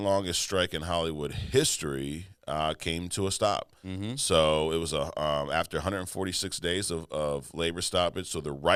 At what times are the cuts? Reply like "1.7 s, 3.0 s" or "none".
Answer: none